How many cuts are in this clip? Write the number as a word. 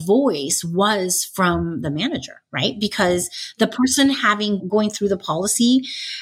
one